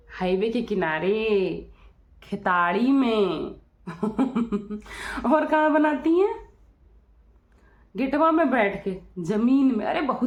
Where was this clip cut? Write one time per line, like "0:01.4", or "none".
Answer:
none